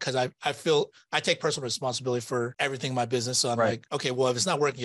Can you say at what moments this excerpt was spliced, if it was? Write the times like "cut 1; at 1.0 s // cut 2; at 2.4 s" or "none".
cut 1; at 2.5 s // cut 2; at 3.9 s